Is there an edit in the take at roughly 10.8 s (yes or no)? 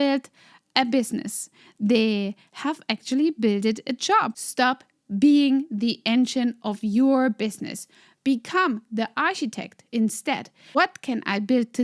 yes